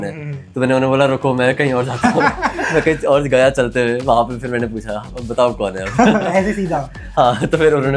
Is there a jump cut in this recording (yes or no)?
no